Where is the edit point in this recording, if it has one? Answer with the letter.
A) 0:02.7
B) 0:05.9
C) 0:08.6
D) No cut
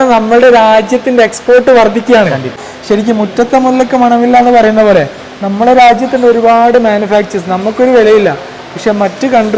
A